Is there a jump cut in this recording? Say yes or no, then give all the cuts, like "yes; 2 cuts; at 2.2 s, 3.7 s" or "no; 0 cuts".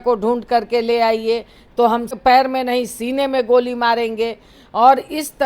yes; 1 cut; at 2.1 s